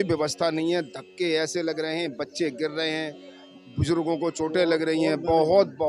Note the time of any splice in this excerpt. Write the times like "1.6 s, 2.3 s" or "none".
none